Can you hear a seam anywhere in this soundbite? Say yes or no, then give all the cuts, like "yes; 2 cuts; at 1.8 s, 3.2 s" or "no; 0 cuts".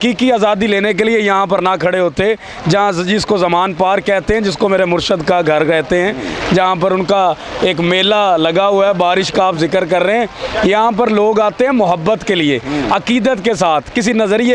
no; 0 cuts